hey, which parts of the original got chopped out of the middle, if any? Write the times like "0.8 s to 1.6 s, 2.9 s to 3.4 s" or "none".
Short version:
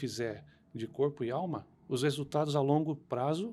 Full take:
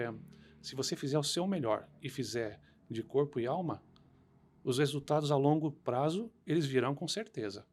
3.9 s to 4.5 s